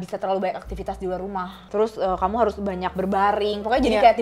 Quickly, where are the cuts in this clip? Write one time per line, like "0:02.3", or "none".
0:01.6